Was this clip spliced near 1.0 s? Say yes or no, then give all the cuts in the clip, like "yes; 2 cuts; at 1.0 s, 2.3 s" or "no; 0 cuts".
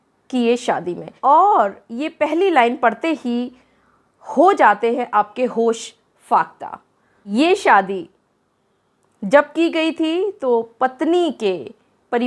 yes; 2 cuts; at 1.0 s, 7.3 s